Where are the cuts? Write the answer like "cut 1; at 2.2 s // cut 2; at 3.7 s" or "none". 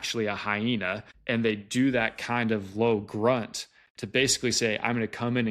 cut 1; at 1.1 s